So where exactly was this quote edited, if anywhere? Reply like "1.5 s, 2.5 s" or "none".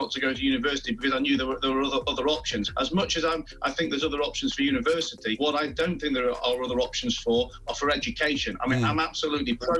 2.7 s, 5.4 s